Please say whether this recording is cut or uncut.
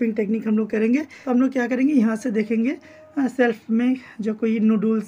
cut